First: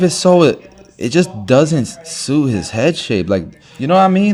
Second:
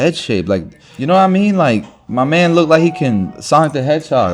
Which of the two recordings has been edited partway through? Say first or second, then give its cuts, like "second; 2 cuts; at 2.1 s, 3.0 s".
second; 1 cut; at 3.3 s